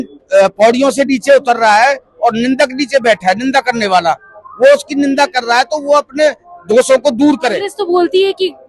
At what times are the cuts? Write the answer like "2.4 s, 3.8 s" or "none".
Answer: 7.7 s